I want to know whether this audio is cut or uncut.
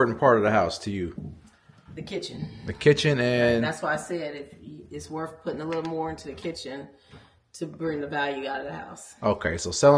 uncut